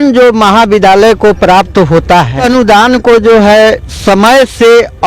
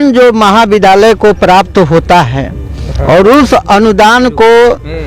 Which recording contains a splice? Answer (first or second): first